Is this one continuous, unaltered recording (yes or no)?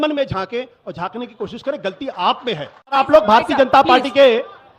no